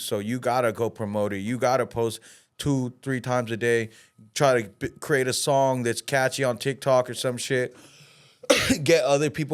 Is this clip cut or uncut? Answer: uncut